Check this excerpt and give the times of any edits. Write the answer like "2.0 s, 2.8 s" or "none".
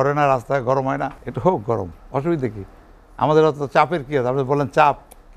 1.2 s